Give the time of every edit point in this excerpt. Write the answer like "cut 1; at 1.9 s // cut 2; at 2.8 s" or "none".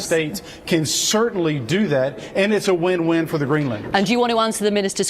cut 1; at 3.9 s